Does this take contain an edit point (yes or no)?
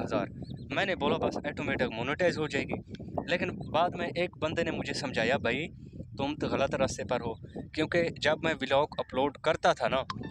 no